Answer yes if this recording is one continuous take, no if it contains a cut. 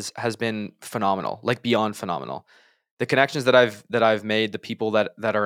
yes